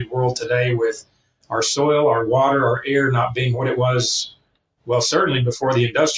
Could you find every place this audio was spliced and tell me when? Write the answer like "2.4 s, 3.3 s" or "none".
none